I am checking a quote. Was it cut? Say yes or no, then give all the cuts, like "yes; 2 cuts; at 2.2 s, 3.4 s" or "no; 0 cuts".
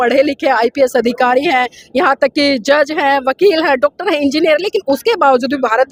no; 0 cuts